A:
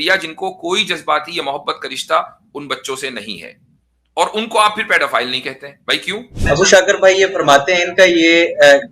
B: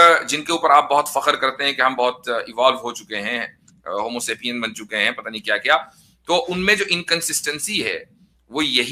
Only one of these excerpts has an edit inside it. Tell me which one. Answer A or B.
A